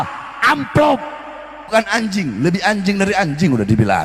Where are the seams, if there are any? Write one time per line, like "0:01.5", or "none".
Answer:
0:01.7